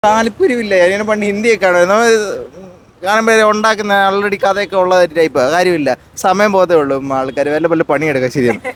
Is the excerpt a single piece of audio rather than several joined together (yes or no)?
yes